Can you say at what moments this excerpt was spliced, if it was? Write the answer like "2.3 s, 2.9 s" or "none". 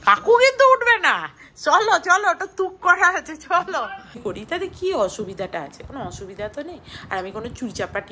4.3 s